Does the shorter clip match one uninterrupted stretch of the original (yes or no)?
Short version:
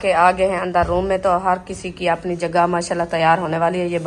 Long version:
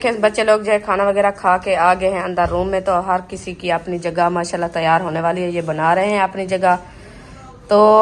yes